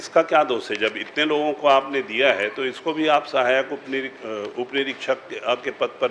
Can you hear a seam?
no; 0 cuts

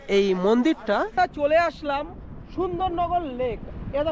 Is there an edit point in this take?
yes; 1 cut; at 1.1 s

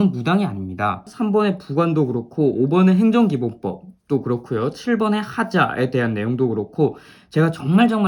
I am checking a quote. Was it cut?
yes; 1 cut; at 1.1 s

